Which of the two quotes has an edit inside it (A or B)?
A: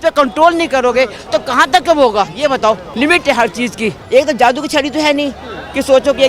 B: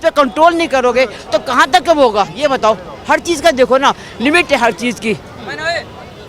A